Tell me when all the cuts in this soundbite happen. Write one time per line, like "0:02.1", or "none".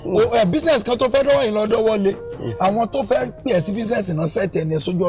none

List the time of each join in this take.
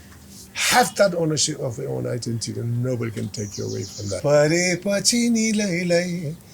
0:04.2

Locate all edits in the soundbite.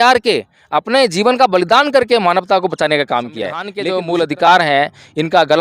0:03.8

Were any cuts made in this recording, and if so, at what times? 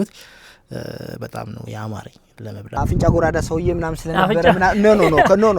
0:02.8

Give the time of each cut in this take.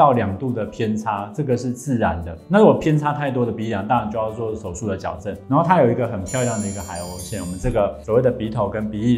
none

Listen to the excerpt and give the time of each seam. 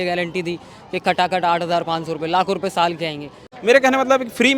0:03.5

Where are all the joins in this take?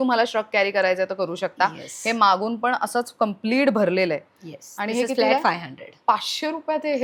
none

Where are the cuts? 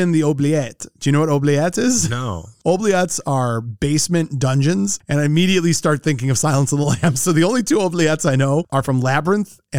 0:02.5

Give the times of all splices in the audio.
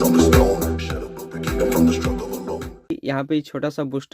0:02.9

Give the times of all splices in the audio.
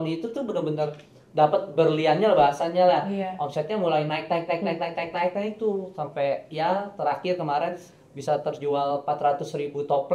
none

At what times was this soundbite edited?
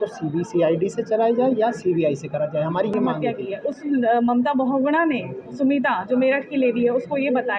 0:03.1

